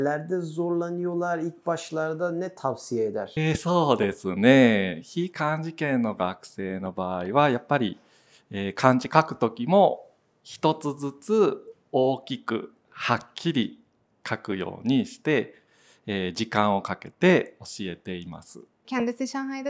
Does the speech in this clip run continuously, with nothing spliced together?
yes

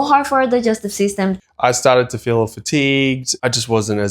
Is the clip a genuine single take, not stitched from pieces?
no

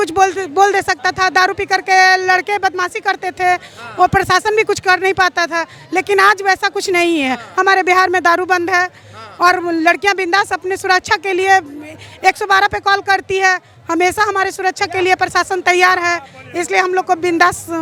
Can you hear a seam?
no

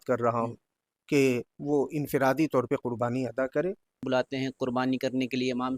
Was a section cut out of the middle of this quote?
yes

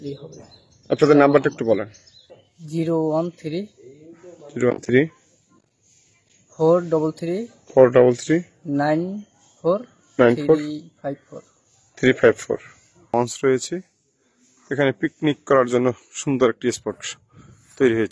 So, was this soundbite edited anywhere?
yes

